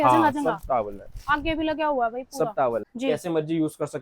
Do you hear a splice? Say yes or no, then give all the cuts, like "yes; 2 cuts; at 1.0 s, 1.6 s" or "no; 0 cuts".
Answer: yes; 1 cut; at 2.8 s